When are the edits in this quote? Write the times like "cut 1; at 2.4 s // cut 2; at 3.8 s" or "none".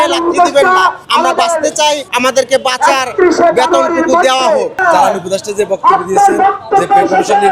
cut 1; at 1.0 s // cut 2; at 2.1 s // cut 3; at 4.8 s